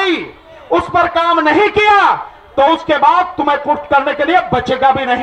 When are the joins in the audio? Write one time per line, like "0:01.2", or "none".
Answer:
none